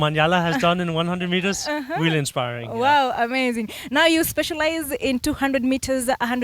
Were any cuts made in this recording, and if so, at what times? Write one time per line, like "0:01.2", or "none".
none